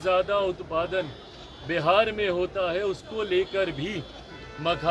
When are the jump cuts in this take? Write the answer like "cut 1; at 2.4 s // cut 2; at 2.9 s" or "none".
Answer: none